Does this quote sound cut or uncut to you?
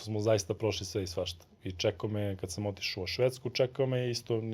uncut